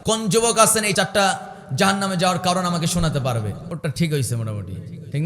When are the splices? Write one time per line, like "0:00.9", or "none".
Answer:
0:00.9
0:03.6